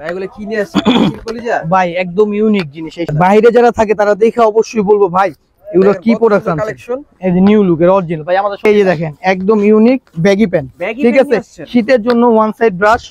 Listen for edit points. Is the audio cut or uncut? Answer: cut